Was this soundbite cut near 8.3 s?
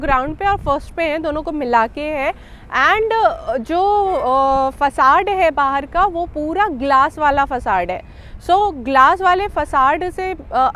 no; 0 cuts

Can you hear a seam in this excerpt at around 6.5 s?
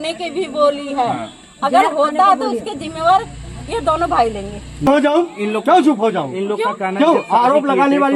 no; 1 cut; at 4.9 s

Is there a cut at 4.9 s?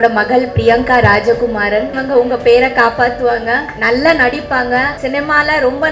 yes; 3 cuts; at 2.0 s, 3.7 s, 4.9 s

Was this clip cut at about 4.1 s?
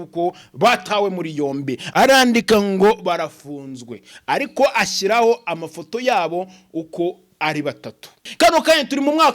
no; 2 cuts; at 1.8 s, 8.2 s

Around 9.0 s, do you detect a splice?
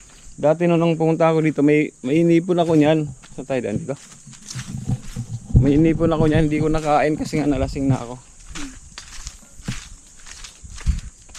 no; 0 cuts

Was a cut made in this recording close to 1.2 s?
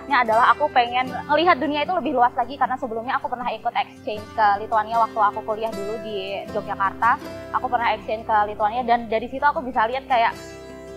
yes; 1 cut; at 1.2 s

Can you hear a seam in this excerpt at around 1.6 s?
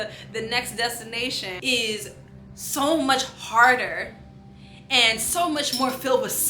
yes; 1 cut; at 1.6 s

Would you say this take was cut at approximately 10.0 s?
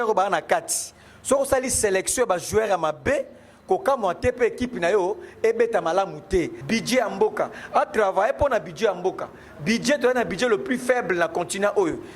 no; 1 cut; at 6.6 s

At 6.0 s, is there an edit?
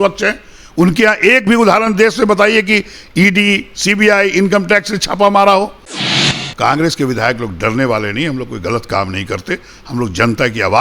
yes; 1 cut; at 6.0 s

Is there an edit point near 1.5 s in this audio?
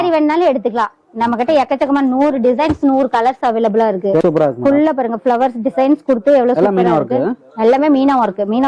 no; 1 cut; at 4.2 s

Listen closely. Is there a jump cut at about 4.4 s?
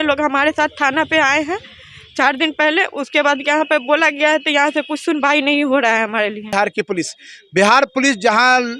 no; 1 cut; at 6.5 s

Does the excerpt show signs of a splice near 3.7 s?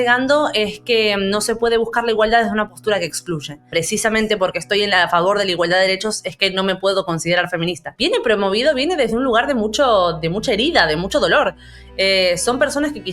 yes; 2 cuts; at 3.7 s, 7.9 s

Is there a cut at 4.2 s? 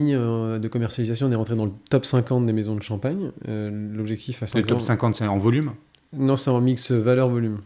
no; 0 cuts

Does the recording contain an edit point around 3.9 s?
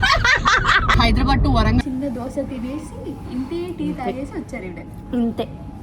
no; 2 cuts; at 0.9 s, 1.8 s

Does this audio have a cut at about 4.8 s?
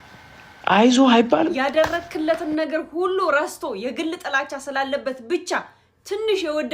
no; 1 cut; at 1.5 s

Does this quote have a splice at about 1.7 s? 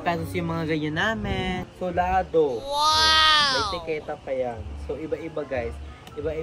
yes; 1 cut; at 1.7 s

